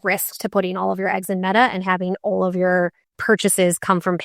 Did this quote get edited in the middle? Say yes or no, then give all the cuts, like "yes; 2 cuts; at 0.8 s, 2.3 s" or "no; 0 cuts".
no; 0 cuts